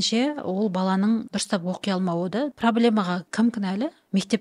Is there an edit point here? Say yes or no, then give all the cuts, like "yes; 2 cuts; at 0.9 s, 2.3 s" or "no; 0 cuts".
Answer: yes; 3 cuts; at 1.3 s, 2.5 s, 3.3 s